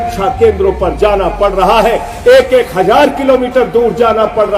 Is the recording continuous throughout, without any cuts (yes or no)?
yes